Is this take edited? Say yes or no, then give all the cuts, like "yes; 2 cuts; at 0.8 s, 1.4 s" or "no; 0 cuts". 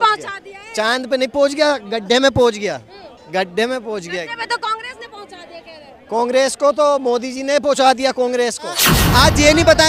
yes; 1 cut; at 8.9 s